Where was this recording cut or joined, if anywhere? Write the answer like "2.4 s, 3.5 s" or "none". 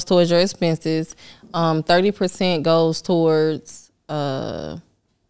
none